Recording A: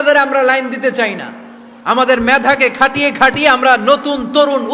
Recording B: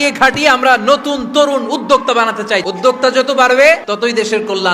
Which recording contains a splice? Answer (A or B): B